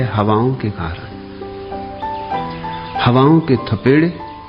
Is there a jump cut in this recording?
yes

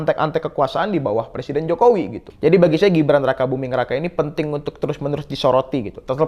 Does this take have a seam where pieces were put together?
yes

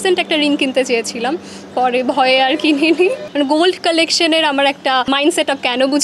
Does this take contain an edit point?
yes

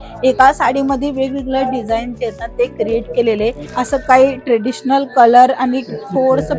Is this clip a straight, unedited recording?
no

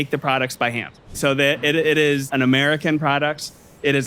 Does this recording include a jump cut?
yes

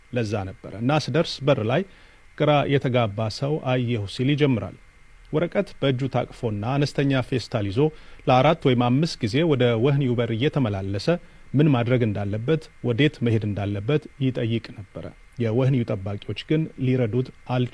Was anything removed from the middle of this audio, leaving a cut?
no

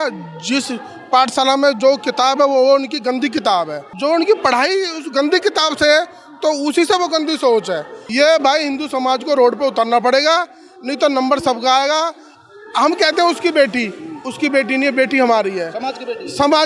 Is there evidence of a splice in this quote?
yes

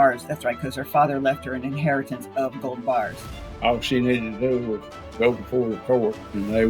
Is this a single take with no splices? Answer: no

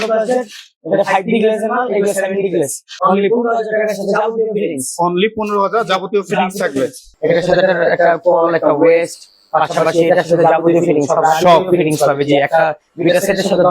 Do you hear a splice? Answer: yes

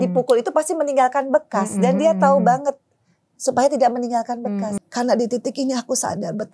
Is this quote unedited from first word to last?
no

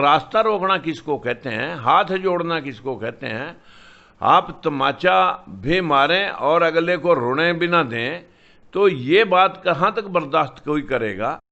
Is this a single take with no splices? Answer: yes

